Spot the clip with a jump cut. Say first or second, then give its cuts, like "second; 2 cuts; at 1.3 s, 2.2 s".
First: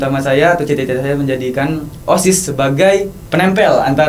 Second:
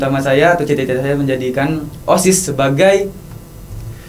first; 1 cut; at 3.2 s